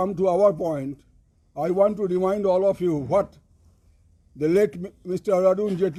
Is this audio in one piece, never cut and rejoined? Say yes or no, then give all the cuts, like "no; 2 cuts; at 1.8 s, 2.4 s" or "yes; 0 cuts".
yes; 0 cuts